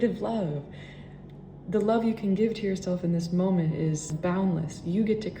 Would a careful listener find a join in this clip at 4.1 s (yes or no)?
yes